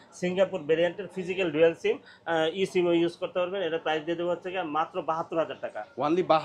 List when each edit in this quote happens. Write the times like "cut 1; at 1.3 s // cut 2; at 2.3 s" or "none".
none